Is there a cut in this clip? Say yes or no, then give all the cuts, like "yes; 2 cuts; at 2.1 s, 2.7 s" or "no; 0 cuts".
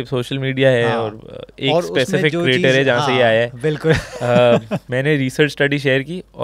yes; 1 cut; at 4.8 s